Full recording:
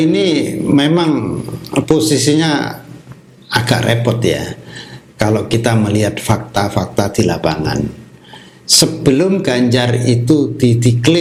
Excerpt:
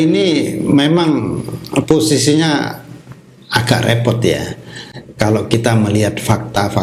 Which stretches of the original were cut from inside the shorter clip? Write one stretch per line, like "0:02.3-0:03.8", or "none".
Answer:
none